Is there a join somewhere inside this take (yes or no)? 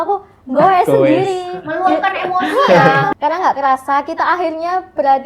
yes